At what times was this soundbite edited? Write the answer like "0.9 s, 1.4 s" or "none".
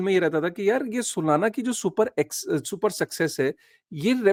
none